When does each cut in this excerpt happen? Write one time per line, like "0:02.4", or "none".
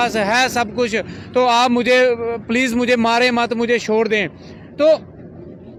none